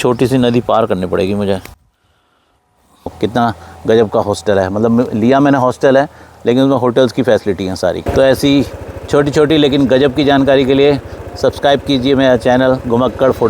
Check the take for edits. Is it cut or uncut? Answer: cut